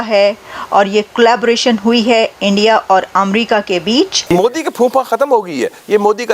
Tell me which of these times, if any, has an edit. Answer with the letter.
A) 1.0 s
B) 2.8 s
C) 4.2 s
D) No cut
C